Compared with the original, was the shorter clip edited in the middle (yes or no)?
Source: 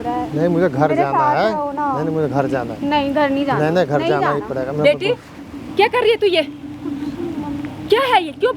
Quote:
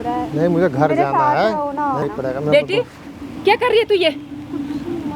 yes